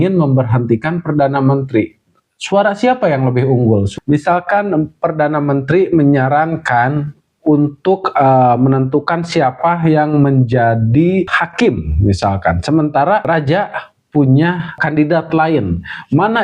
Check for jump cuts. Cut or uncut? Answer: cut